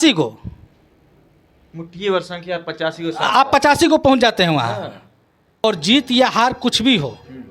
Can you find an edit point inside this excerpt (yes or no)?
yes